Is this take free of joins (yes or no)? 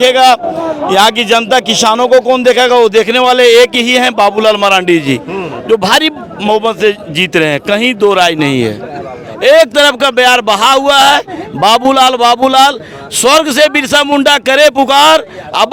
yes